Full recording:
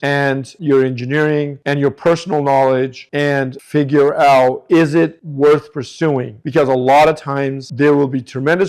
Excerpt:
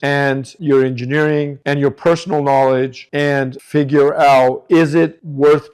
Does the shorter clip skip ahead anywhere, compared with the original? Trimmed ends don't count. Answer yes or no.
no